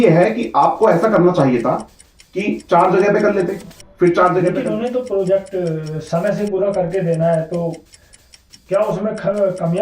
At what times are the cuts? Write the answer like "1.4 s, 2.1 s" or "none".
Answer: 4.6 s